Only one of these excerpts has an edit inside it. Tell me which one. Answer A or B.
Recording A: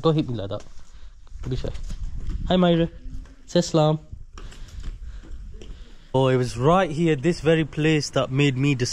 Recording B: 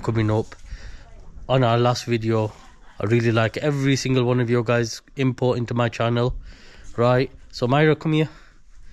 A